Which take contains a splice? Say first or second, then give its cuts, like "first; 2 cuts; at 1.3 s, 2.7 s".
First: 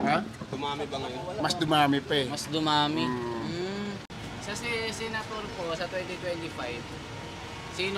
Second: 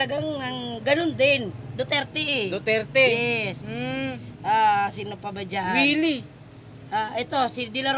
first; 1 cut; at 4.2 s